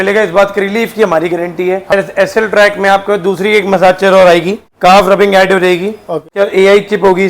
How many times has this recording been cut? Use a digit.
3